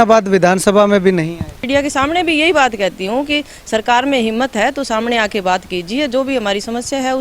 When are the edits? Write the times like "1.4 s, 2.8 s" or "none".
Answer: 1.7 s

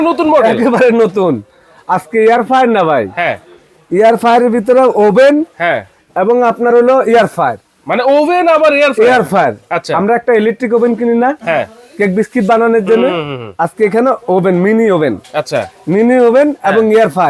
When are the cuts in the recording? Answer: none

